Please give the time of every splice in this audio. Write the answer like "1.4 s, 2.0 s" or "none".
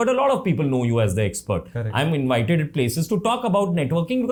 none